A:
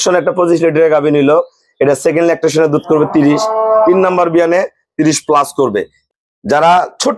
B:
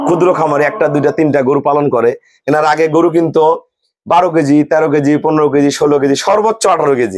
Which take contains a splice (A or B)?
A